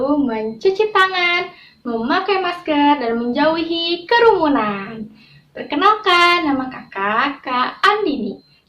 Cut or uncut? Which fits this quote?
uncut